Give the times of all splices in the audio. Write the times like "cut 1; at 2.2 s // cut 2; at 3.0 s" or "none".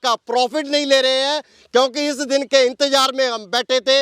none